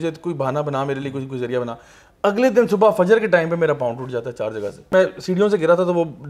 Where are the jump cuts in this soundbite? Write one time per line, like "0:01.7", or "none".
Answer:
0:04.9